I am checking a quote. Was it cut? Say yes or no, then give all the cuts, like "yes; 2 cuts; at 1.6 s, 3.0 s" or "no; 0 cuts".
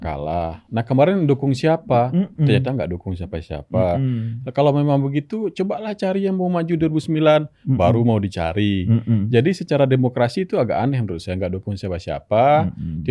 no; 0 cuts